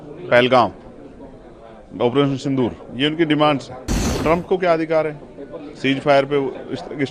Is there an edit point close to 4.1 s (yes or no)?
yes